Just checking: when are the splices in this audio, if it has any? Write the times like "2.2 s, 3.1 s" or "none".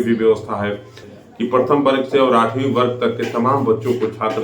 1.1 s